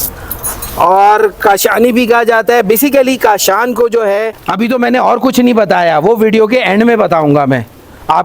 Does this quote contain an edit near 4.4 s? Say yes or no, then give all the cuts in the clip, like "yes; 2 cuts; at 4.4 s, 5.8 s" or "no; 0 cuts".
yes; 1 cut; at 4.4 s